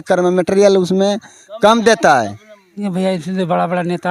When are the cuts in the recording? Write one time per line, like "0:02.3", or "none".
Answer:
0:02.8